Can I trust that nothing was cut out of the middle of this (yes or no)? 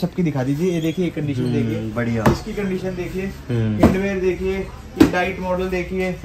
yes